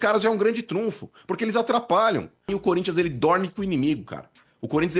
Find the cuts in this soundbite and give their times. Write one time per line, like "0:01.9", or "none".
0:02.5